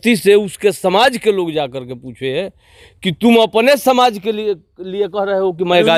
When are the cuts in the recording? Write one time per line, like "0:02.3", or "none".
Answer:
none